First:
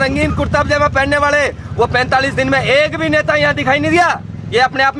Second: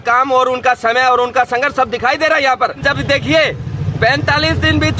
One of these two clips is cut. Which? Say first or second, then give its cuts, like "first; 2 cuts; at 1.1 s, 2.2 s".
second; 1 cut; at 2.8 s